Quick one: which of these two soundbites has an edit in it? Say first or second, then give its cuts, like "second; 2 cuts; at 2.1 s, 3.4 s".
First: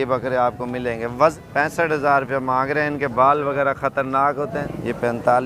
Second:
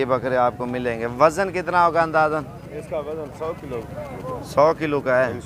first; 2 cuts; at 1.3 s, 4.6 s